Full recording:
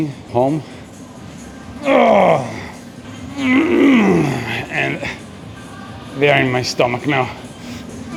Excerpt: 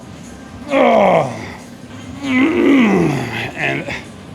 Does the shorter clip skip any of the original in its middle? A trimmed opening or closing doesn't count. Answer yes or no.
no